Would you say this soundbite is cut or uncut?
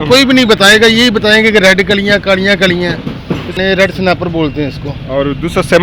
cut